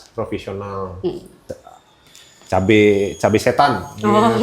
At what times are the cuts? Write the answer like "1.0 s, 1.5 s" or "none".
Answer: 1.4 s